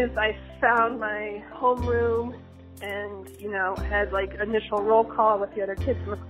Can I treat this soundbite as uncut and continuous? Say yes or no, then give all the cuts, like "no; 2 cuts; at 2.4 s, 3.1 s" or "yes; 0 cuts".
no; 1 cut; at 2.5 s